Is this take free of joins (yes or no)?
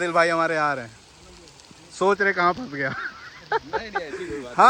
yes